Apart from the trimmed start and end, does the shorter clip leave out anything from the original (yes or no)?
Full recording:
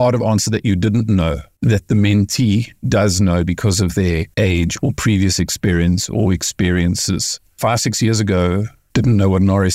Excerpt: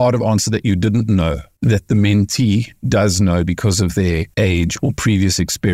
no